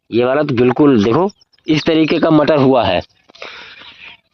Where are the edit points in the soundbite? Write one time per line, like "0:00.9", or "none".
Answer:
none